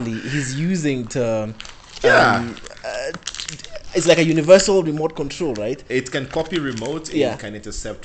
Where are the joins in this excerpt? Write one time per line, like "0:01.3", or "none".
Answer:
none